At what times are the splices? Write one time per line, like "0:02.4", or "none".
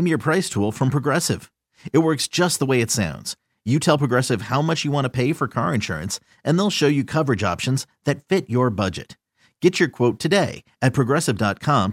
none